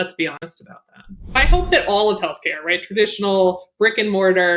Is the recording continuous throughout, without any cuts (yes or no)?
no